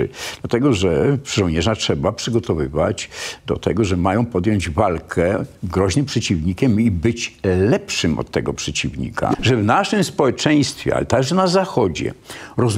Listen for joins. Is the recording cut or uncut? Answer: cut